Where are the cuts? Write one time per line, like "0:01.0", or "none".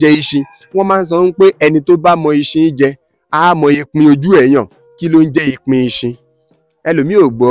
none